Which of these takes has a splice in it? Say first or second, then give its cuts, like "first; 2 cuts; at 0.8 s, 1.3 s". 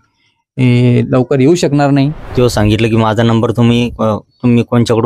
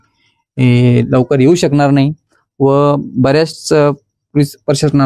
first; 1 cut; at 2.2 s